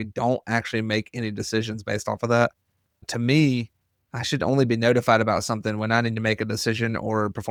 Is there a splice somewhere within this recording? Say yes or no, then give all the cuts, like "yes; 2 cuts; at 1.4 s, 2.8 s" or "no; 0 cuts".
no; 0 cuts